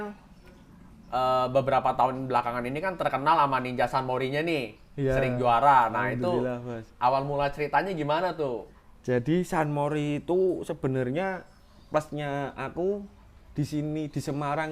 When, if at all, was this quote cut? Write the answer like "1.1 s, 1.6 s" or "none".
none